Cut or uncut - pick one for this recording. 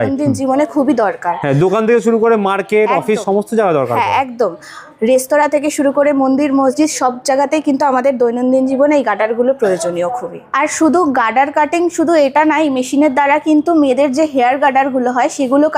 uncut